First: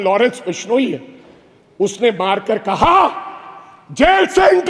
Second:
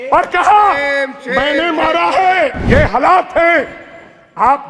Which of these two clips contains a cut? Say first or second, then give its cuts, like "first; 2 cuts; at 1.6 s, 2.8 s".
second; 1 cut; at 2.6 s